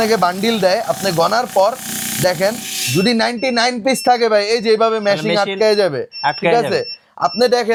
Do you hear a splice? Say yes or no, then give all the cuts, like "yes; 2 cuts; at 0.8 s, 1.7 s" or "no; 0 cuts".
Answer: no; 0 cuts